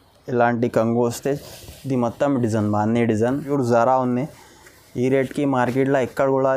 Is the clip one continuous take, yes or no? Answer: no